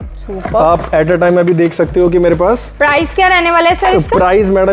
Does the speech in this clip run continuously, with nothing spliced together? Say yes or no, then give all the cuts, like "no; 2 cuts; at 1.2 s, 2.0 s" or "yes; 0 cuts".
yes; 0 cuts